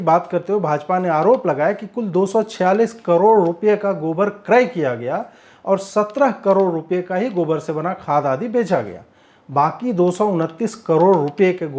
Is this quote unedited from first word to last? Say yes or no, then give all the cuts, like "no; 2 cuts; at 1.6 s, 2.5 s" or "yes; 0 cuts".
yes; 0 cuts